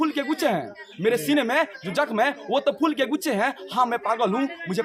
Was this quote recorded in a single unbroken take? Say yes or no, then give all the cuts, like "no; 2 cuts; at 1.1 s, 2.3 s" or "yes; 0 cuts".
yes; 0 cuts